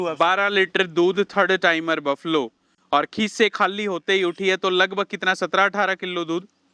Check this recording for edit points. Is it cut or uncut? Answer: uncut